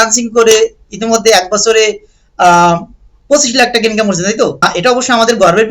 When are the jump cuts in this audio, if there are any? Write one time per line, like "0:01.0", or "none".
0:04.7